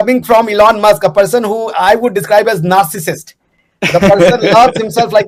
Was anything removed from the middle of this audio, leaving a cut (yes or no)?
no